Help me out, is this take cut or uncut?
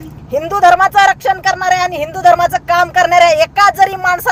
uncut